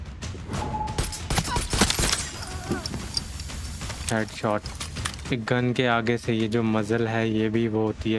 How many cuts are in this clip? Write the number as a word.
one